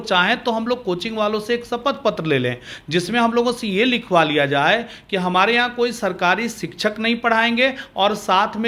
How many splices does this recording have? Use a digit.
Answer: 0